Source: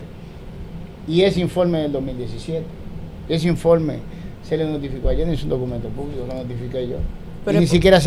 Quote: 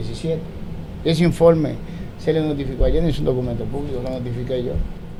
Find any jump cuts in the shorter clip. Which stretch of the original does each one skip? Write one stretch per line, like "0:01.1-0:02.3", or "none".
none